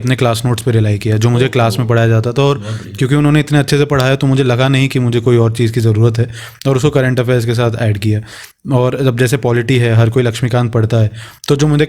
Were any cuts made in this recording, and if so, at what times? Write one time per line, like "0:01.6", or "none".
none

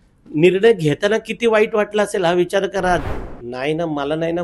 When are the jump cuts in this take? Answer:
0:03.0

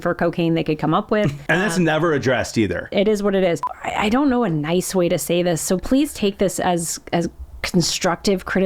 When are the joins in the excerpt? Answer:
0:01.4
0:02.9
0:03.6

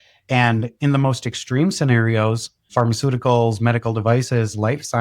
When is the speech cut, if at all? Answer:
0:02.5

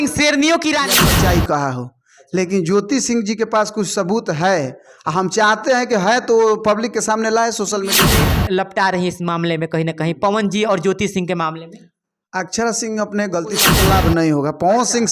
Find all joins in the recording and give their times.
0:01.1
0:08.0
0:13.7

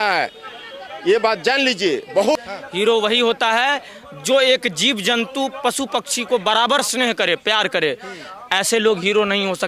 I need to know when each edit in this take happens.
0:02.4

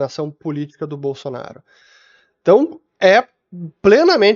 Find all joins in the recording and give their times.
none

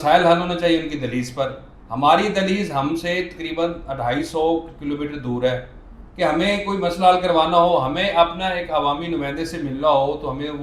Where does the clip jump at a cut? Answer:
none

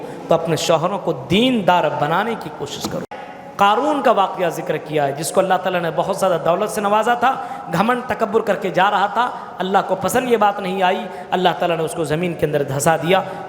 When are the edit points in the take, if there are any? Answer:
0:03.2

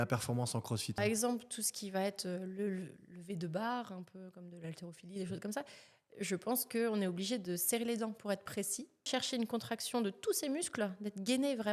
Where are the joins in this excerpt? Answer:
0:01.0
0:09.1

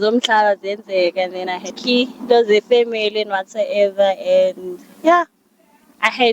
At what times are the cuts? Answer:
0:01.8

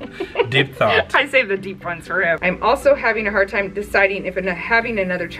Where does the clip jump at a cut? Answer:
0:02.4

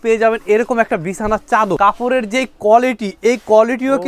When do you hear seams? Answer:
0:01.8

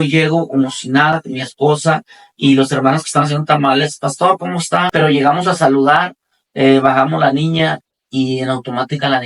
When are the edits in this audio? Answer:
0:04.9

